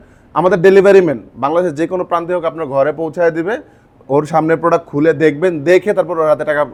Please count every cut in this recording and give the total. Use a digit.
0